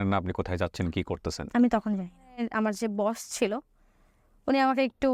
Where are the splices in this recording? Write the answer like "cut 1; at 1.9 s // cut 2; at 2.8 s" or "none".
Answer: cut 1; at 2.4 s